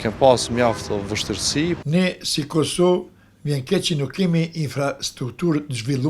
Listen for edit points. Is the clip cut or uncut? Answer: cut